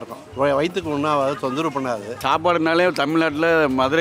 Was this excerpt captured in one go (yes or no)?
no